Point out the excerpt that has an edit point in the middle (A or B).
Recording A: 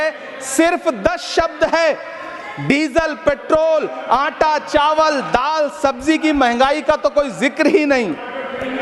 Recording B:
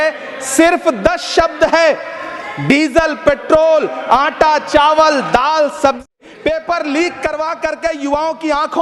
B